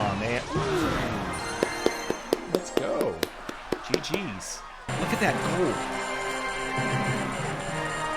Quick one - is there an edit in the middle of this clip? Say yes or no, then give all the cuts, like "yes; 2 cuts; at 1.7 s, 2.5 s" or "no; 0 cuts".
yes; 1 cut; at 4.9 s